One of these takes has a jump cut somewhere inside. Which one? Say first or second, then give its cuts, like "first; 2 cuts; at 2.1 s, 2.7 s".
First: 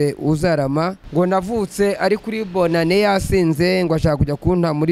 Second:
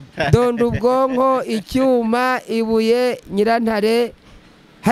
first; 1 cut; at 1.0 s